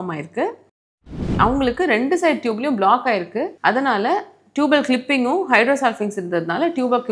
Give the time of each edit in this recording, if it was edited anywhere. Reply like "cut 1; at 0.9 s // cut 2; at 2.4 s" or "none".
cut 1; at 1.2 s // cut 2; at 3.5 s